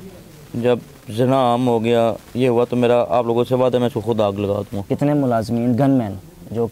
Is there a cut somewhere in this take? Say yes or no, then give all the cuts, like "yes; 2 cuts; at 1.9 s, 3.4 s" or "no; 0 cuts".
yes; 1 cut; at 4.8 s